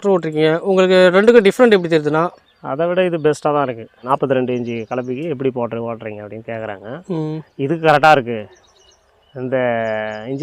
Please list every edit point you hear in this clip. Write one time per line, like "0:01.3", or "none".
0:04.0

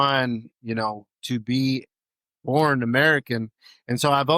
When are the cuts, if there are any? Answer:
none

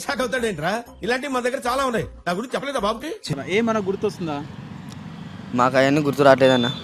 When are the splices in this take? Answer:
0:03.3

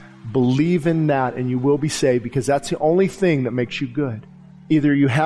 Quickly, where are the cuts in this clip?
none

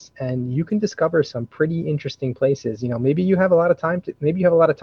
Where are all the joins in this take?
none

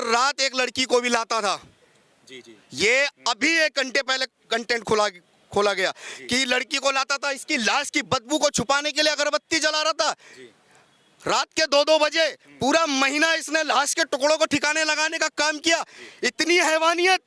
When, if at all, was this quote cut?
none

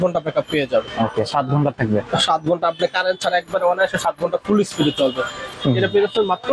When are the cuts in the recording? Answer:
0:05.5

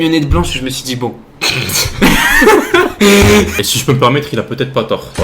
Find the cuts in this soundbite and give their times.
0:03.5

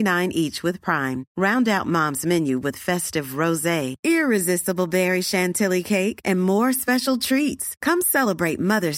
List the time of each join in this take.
none

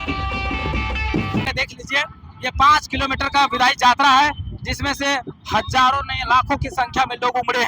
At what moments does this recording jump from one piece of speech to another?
0:01.5

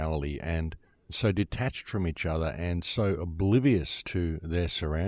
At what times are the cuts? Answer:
none

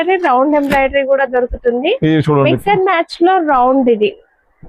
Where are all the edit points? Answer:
none

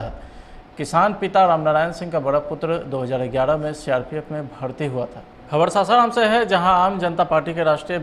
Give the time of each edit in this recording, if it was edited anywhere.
0:05.5

